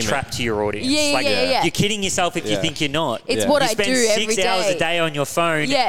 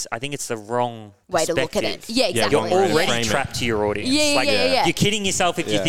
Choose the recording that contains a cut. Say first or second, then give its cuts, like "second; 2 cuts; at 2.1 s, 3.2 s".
second; 1 cut; at 1.1 s